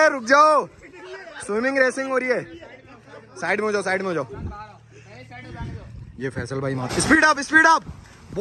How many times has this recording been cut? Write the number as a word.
one